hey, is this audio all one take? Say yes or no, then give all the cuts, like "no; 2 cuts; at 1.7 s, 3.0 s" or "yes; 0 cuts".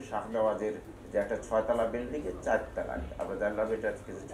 no; 1 cut; at 0.9 s